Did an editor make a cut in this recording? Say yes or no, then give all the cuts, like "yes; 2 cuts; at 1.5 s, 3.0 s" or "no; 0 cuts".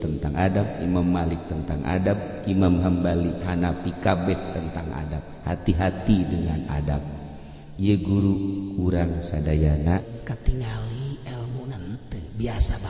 yes; 1 cut; at 10.1 s